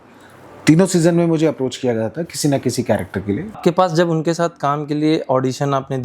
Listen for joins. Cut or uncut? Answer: cut